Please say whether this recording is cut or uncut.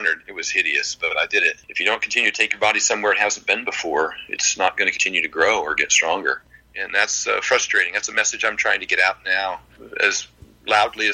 cut